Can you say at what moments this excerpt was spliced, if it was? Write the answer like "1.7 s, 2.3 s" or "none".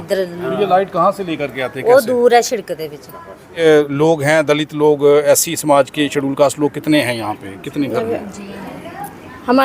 3.6 s